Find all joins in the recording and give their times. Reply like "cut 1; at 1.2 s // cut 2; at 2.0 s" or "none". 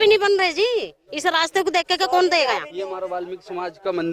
cut 1; at 2.7 s

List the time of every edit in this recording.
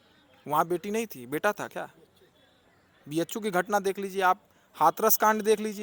none

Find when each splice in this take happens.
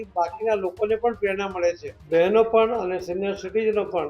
cut 1; at 1.9 s

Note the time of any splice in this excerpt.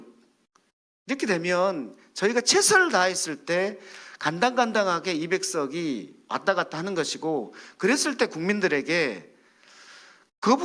none

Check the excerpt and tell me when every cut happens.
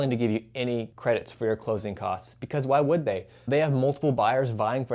cut 1; at 0.9 s

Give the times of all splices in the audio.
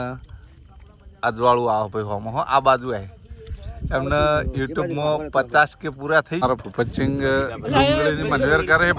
cut 1; at 6.4 s

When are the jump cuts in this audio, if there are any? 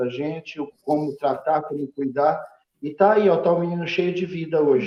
none

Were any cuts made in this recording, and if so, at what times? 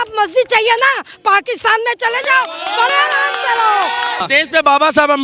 cut 1; at 4.2 s

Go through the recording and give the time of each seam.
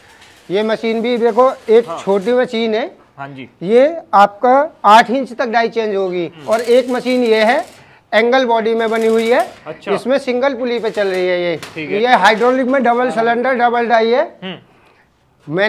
cut 1; at 6.4 s // cut 2; at 11.9 s

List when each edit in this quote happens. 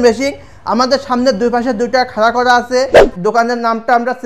cut 1; at 3.1 s

